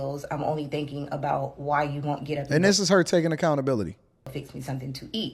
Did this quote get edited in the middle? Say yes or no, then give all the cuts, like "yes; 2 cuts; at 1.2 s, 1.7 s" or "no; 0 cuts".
no; 0 cuts